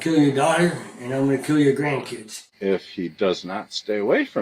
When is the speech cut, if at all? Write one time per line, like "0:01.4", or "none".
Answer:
0:02.4